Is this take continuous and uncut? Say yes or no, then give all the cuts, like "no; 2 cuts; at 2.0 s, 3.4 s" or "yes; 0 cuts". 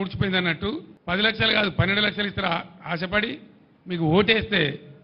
no; 1 cut; at 0.9 s